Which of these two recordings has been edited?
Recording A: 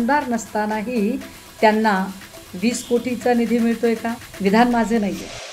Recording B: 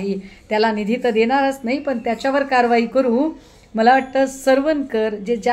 A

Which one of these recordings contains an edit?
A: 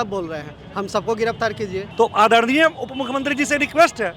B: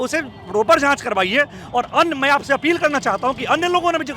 A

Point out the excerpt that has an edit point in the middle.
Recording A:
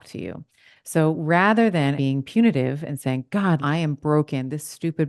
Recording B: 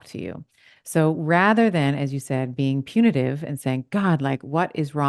A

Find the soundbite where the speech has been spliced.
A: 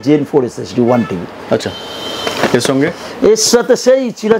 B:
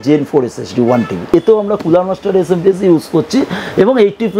B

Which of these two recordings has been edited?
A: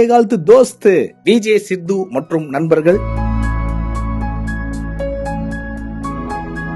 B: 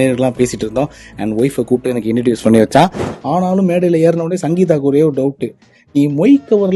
B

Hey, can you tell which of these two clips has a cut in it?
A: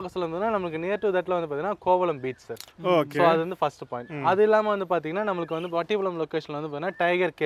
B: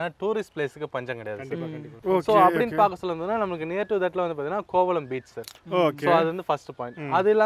B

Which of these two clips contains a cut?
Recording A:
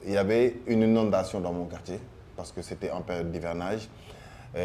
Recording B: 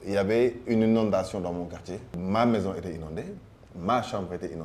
B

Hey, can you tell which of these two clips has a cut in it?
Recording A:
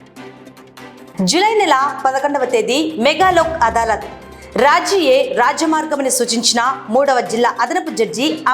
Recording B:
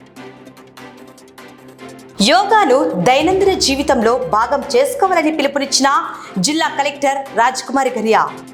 A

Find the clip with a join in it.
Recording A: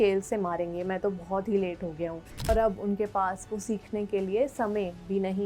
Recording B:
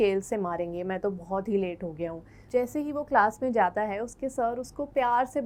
A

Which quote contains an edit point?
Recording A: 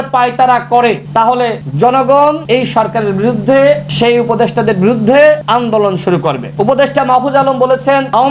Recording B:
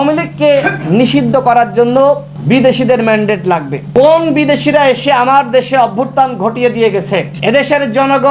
A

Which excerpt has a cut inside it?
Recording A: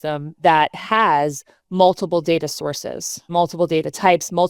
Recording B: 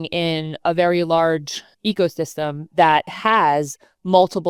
A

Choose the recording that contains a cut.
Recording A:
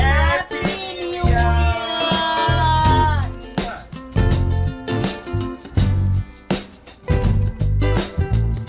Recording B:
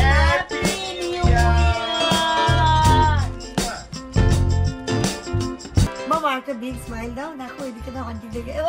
B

